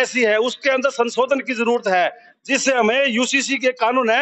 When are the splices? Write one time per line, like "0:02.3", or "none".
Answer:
none